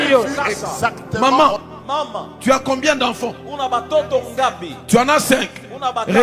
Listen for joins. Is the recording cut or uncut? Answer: cut